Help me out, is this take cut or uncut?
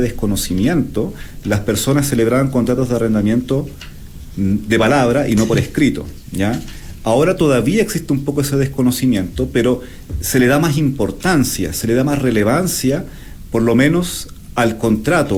uncut